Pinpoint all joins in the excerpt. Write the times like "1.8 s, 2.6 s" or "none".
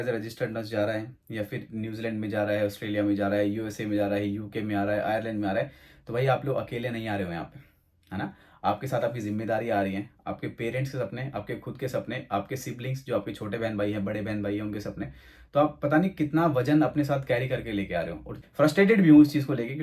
18.4 s